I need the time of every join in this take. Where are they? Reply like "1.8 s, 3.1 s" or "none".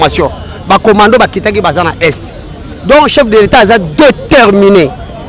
none